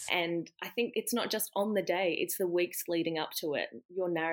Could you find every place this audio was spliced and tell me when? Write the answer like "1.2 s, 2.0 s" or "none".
0.9 s